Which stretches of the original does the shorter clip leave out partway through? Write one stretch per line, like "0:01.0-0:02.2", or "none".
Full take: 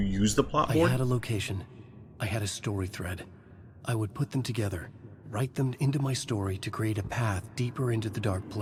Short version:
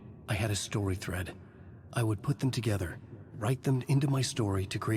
none

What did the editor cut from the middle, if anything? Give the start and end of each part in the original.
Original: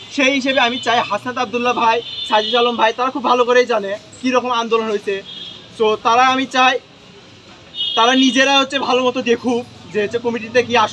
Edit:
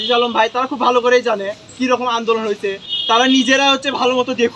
0:05.3-0:07.8

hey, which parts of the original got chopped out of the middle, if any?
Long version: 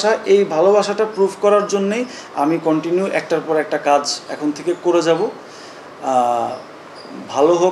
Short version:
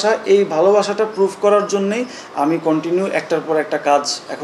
none

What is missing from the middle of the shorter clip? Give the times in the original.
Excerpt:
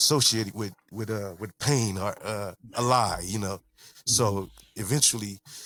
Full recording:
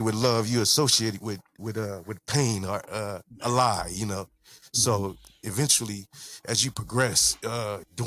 none

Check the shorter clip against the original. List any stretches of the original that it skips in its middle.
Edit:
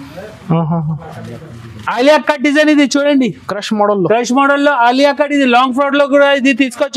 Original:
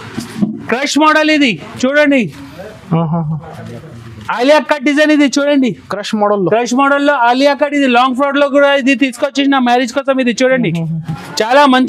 none

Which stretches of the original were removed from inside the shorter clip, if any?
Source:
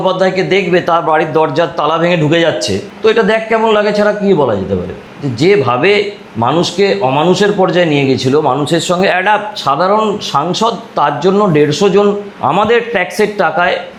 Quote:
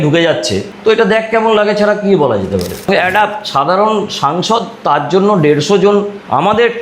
0:05.0-0:09.0

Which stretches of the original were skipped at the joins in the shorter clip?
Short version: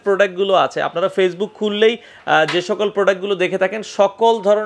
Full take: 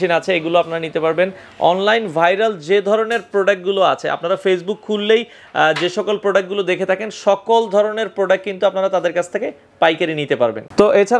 none

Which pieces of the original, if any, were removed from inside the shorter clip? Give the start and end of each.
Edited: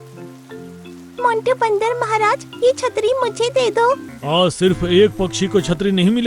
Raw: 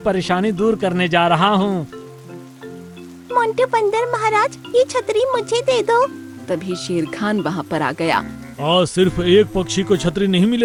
0:06.2-0:08.5

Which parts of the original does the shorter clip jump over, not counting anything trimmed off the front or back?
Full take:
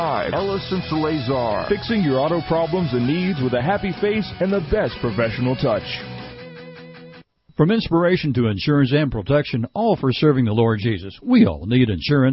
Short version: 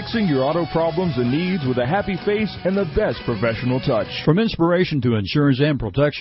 0:05.9-0:07.5

